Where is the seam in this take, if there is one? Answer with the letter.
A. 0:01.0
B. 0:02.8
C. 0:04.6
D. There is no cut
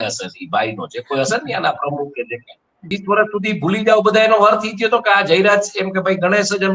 B